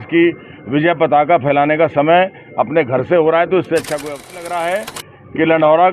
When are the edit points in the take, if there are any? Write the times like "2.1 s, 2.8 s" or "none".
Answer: 4.3 s